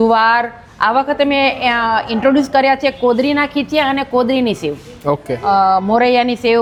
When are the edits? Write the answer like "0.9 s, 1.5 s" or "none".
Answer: none